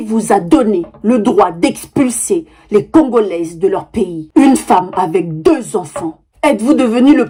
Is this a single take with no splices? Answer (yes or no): yes